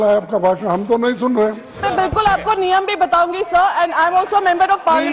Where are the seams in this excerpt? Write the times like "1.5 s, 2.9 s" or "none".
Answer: 1.8 s